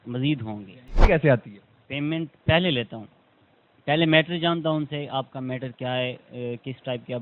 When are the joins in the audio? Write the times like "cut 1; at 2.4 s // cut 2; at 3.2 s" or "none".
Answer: cut 1; at 1.0 s